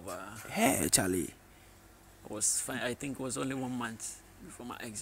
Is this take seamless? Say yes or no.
yes